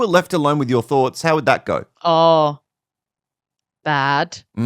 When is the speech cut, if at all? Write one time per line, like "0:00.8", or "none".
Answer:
0:01.9

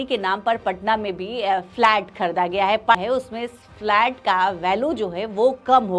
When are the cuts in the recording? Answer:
0:03.0

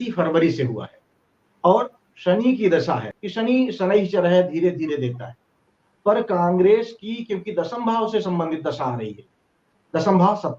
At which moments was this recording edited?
0:03.1

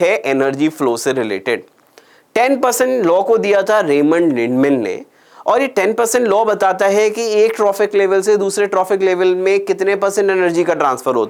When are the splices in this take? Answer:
none

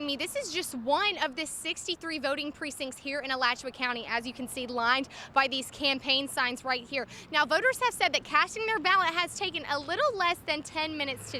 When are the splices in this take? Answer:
none

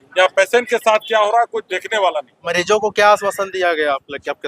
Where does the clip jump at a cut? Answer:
0:02.5

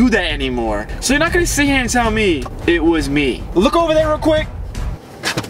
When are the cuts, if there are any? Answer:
0:00.9
0:02.5
0:03.4

